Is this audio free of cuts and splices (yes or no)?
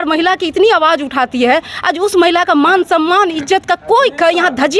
yes